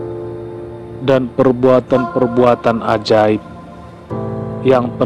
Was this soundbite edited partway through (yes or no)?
yes